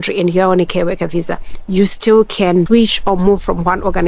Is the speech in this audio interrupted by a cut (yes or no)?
yes